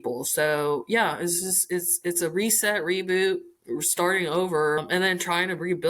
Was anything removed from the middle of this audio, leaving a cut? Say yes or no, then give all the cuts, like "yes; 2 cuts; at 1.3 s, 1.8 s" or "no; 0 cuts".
yes; 1 cut; at 4.8 s